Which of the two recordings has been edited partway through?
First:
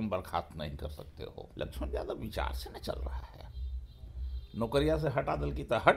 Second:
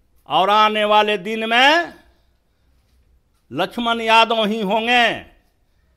first; 1 cut; at 1.4 s

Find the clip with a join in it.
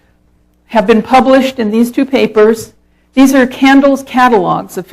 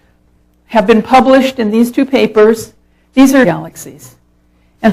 first; 1 cut; at 3.5 s

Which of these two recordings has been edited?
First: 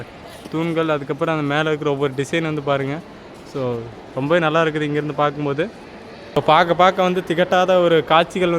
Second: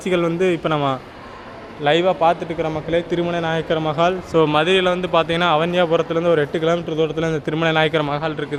first; 1 cut; at 6.4 s

